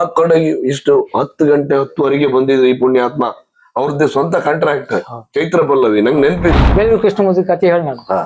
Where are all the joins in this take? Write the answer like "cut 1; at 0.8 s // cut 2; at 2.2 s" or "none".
cut 1; at 6.6 s